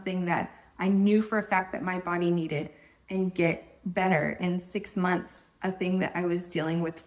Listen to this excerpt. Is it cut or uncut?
uncut